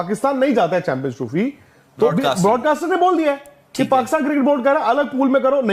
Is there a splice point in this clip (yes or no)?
yes